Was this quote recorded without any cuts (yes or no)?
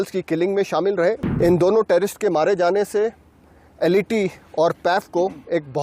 no